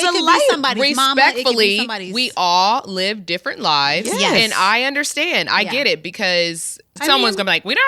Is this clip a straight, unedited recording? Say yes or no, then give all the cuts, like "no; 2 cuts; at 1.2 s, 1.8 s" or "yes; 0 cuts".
no; 1 cut; at 6.9 s